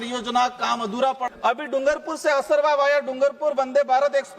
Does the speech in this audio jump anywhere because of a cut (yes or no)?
yes